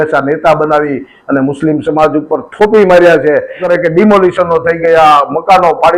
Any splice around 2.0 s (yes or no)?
no